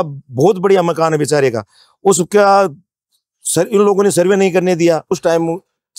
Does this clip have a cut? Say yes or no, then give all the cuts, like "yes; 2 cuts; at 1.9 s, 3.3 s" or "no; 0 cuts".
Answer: yes; 1 cut; at 5.0 s